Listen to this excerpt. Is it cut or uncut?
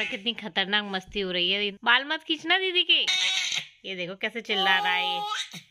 cut